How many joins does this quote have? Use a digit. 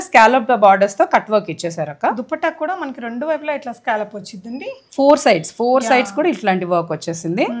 0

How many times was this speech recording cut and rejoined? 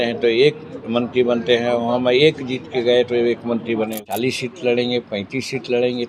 1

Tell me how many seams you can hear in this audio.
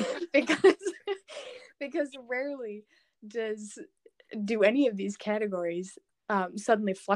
0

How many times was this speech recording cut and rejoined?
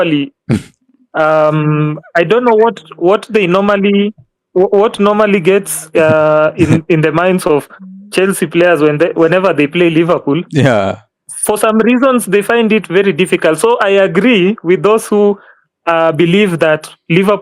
0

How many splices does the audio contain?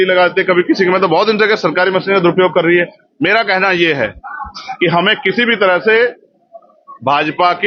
0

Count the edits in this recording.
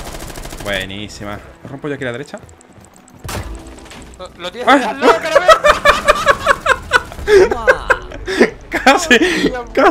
1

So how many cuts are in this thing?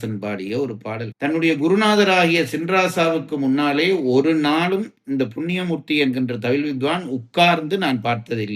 1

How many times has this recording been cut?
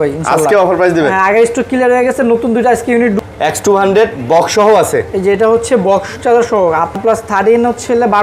2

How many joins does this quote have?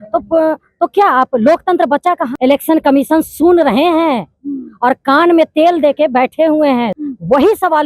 2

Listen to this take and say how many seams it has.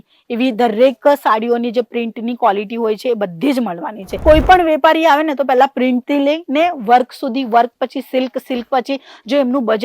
1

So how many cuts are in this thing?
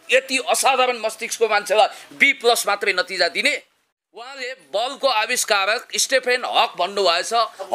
1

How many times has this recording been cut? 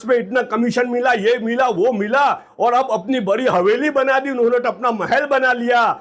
0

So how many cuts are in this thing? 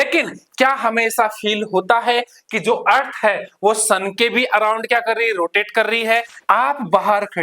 1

